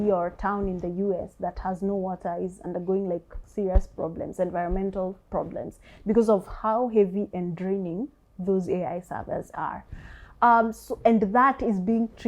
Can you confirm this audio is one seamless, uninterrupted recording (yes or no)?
yes